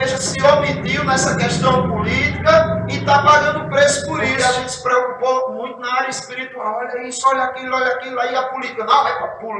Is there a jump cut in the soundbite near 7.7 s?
no; 1 cut; at 4.3 s

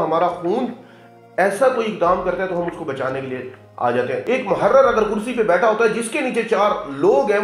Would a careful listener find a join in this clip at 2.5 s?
no; 1 cut; at 4.2 s

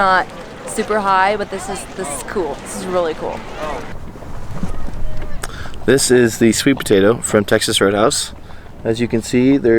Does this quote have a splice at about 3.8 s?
yes; 1 cut; at 3.8 s

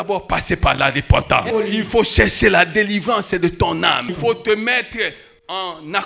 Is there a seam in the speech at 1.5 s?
yes; 2 cuts; at 1.5 s, 4.1 s

